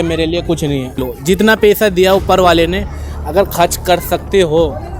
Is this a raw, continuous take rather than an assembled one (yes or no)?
no